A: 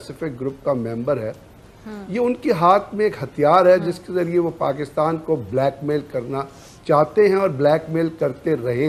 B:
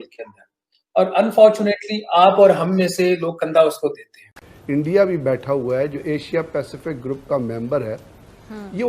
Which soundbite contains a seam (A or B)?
B